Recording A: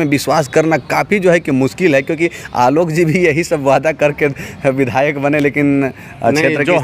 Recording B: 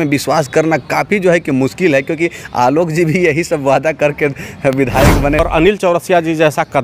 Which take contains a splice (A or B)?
B